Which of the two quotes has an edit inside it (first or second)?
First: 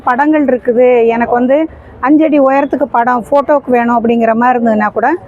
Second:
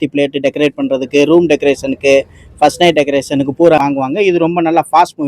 second